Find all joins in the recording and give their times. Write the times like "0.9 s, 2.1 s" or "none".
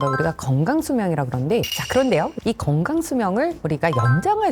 1.8 s